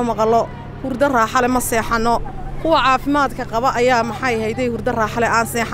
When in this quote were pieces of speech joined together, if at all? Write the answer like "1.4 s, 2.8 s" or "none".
none